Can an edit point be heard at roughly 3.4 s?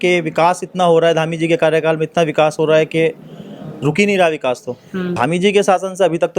no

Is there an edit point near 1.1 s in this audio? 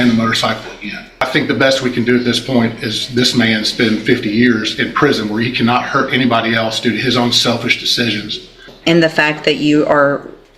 yes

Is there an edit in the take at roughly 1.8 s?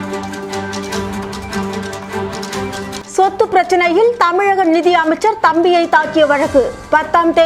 no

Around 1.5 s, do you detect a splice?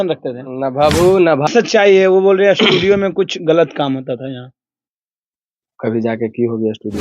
yes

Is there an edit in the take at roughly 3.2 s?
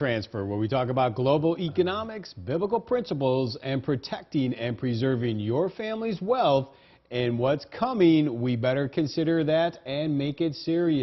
yes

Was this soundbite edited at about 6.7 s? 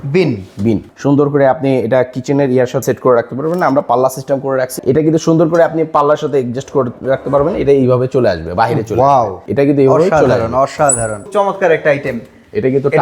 no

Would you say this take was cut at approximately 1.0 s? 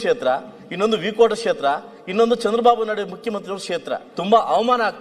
no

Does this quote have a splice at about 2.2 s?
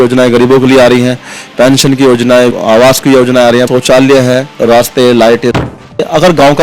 no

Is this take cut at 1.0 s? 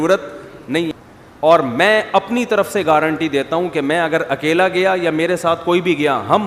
yes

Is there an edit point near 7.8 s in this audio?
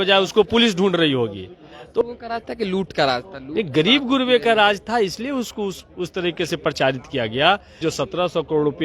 yes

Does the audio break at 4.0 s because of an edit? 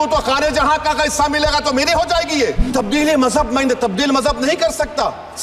no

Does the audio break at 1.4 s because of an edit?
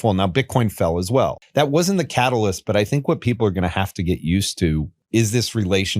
yes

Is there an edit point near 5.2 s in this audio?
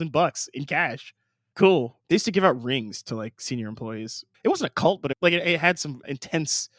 yes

